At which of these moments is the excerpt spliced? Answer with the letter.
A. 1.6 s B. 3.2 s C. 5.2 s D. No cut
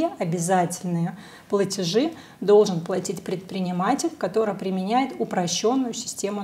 D